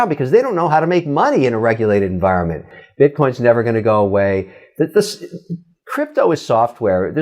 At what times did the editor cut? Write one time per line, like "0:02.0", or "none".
0:02.8